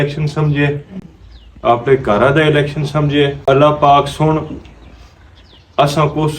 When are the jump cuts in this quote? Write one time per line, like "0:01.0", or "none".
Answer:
0:03.4